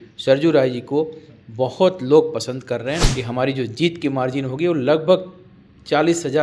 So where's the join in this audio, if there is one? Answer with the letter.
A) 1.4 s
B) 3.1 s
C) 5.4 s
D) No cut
B